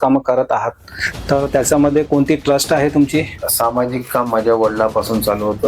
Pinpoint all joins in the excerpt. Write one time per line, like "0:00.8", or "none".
0:03.4